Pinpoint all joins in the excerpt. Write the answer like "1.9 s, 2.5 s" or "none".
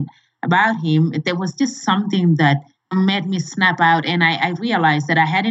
2.9 s